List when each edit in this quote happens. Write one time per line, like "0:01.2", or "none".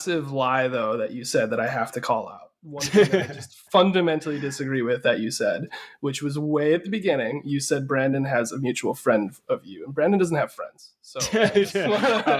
none